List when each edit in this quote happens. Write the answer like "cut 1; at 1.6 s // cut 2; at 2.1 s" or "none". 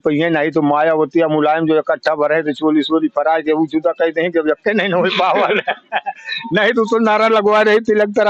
none